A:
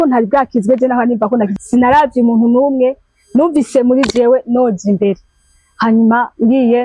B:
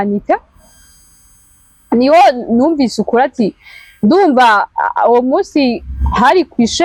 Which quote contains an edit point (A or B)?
A